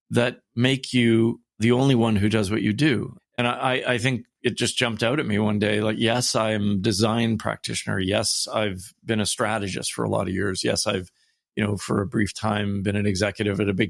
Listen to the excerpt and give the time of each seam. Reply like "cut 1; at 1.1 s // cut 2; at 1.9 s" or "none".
cut 1; at 1.5 s // cut 2; at 3.1 s